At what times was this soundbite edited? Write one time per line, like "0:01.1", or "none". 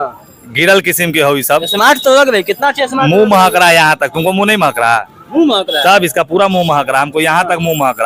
none

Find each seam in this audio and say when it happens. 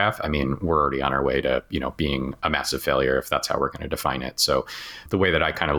none

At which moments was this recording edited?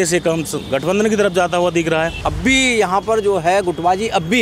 0:02.2

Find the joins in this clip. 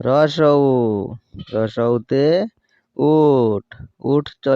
none

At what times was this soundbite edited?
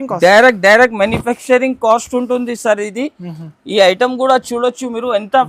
none

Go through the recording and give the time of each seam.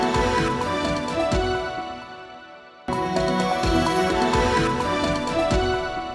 0:03.1

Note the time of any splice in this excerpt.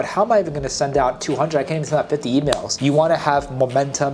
0:02.8

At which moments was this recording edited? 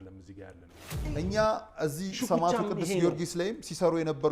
0:01.0

